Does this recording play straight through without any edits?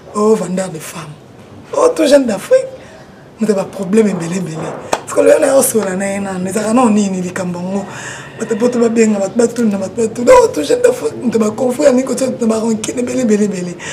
yes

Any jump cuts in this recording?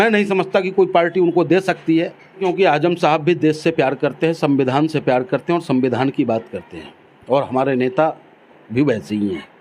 yes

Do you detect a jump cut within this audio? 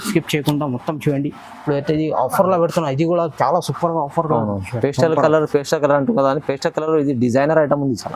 no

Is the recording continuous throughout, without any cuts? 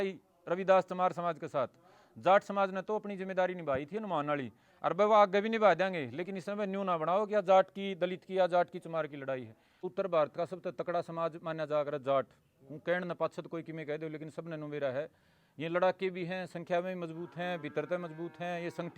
no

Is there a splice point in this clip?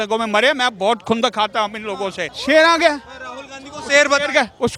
yes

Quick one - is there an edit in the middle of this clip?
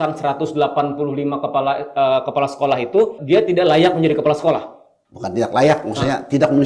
yes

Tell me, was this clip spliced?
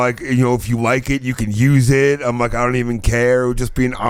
no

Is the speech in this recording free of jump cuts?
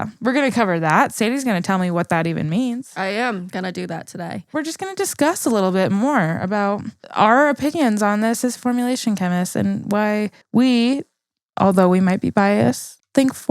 no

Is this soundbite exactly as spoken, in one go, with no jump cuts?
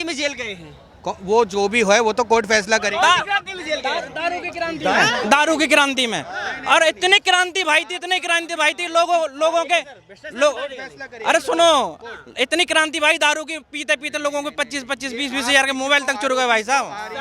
yes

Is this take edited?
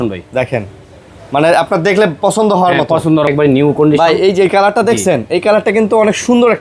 yes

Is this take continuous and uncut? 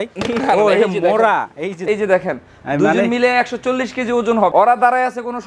no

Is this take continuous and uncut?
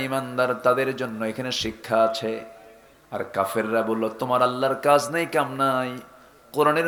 yes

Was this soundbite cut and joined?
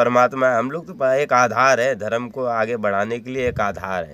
no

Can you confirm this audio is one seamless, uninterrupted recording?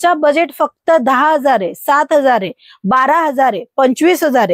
yes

